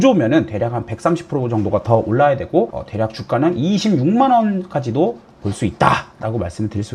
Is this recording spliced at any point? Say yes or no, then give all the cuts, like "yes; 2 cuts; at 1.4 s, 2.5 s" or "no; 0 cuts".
no; 0 cuts